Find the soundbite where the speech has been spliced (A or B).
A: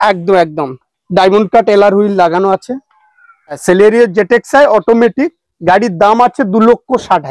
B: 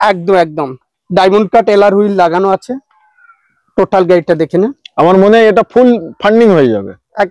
A